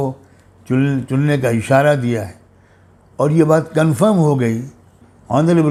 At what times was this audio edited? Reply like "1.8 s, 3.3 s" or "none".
none